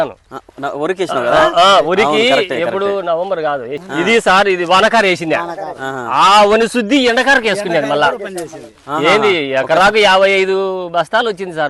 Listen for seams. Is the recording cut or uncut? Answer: uncut